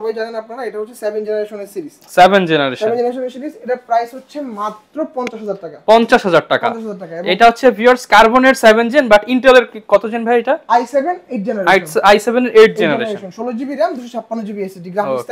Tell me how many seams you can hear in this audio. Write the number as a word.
zero